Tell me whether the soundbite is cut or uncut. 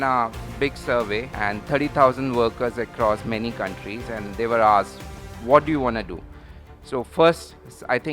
cut